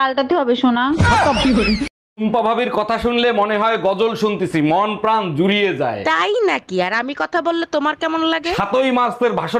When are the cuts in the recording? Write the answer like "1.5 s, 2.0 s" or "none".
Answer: 2.0 s